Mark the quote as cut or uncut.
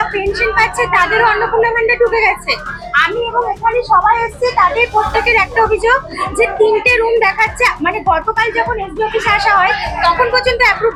uncut